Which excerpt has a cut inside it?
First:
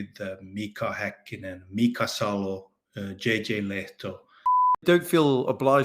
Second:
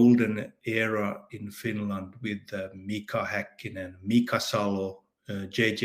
first; 1 cut; at 4.8 s

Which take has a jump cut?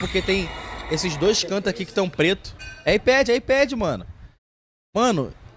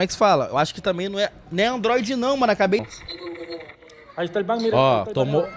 second; 1 cut; at 2.8 s

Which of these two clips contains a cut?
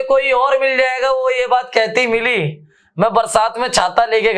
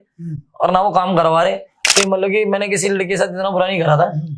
second; 1 cut; at 1.8 s

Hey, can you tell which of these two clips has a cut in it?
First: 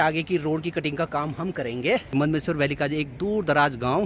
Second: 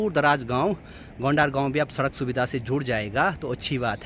first; 1 cut; at 2.1 s

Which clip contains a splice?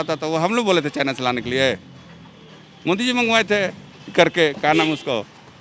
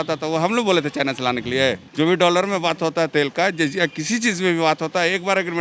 second; 1 cut; at 1.8 s

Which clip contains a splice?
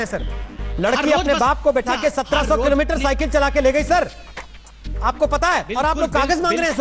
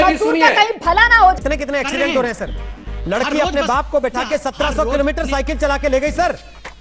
second; 1 cut; at 1.4 s

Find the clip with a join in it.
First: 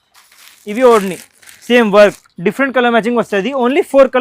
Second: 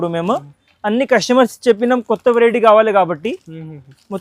first; 1 cut; at 2.1 s

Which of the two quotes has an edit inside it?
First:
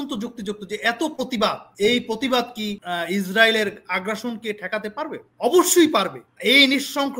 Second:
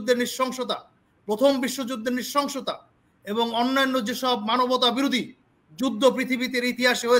first; 4 cuts; at 1.6 s, 2.8 s, 5.2 s, 6.2 s

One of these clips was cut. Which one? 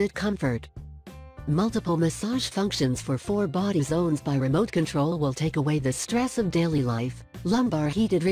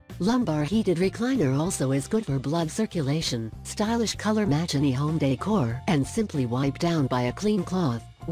second; 1 cut; at 3.6 s

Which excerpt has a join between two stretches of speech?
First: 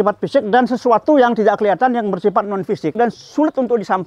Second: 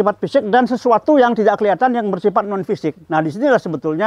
first; 1 cut; at 2.9 s

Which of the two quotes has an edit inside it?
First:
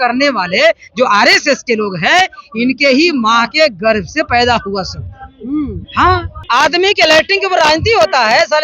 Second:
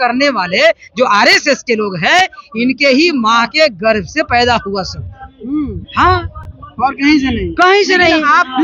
first; 1 cut; at 6.3 s

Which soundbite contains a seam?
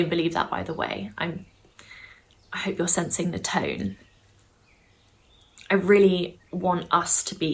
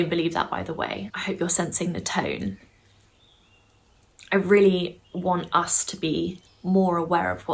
second; 1 cut; at 1.1 s

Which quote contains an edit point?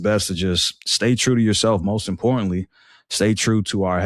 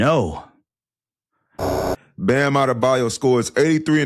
second; 1 cut; at 1.7 s

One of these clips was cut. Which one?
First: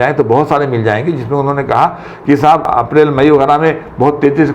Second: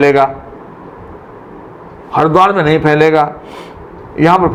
first; 1 cut; at 2.7 s

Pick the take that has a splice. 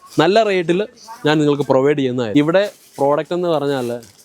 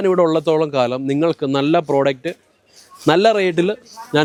first; 1 cut; at 2.3 s

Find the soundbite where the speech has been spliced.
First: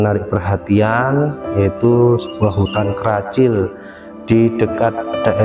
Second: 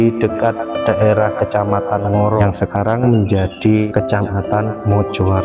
second; 2 cuts; at 2.4 s, 3.9 s

